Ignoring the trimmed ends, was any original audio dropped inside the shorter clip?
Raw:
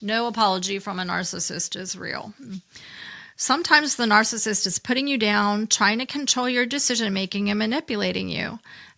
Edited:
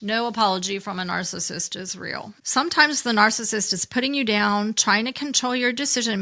yes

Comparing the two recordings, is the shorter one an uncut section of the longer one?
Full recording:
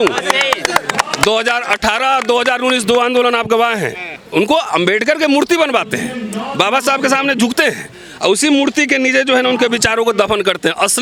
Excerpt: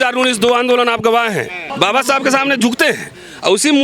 no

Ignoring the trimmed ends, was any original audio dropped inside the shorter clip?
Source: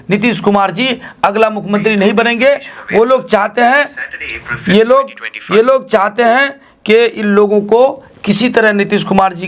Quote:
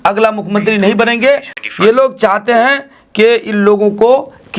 yes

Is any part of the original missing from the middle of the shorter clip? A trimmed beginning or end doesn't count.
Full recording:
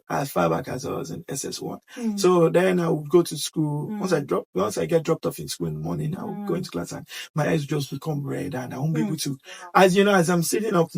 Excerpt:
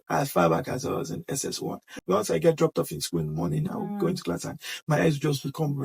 yes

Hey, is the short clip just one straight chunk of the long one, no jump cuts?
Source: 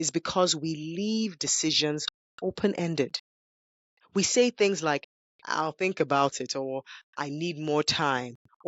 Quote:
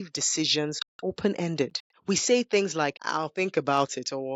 no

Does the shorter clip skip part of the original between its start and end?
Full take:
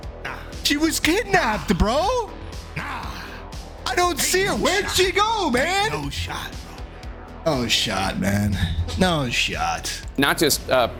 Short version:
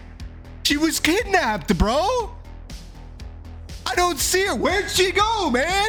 no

